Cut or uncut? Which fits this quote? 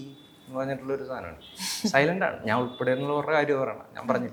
uncut